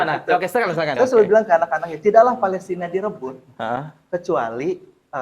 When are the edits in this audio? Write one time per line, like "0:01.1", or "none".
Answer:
0:00.9